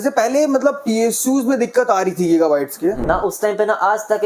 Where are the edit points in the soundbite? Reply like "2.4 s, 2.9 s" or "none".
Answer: 3.0 s